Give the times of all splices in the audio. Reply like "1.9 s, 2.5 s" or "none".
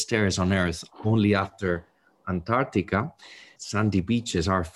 3.5 s